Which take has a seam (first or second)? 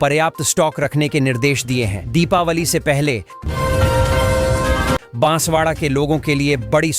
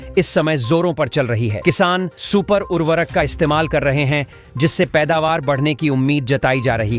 first